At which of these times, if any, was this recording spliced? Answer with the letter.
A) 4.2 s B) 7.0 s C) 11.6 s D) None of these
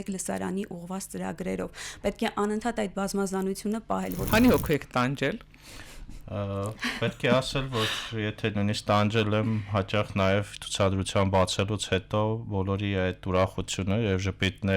A